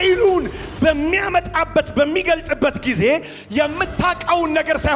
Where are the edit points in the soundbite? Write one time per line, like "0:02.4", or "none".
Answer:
none